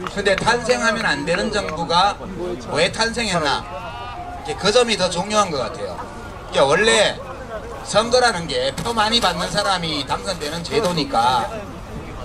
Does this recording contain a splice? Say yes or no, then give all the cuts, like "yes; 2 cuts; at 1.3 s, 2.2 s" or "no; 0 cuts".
no; 0 cuts